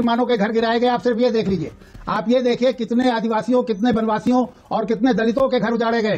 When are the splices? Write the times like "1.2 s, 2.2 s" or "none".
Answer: none